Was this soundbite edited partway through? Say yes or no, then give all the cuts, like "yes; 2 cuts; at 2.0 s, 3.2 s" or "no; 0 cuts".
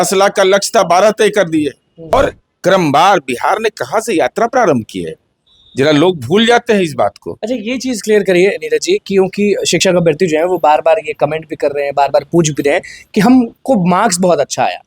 yes; 1 cut; at 2.1 s